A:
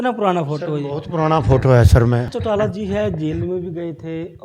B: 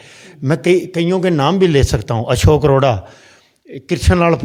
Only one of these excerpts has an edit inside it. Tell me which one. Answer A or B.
A